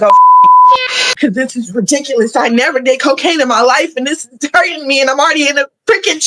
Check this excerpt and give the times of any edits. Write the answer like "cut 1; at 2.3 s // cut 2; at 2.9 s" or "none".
cut 1; at 0.9 s

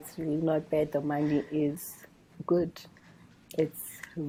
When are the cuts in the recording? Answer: none

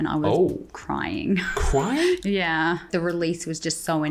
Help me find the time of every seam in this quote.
cut 1; at 2.9 s

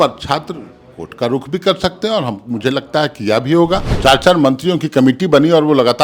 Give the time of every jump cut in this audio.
cut 1; at 3.9 s

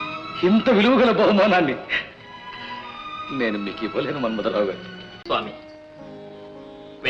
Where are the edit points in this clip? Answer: cut 1; at 5.2 s

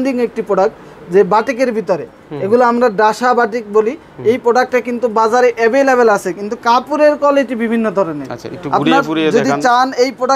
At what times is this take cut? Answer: none

